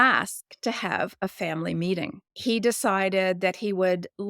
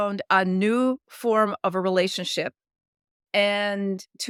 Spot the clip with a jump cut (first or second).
first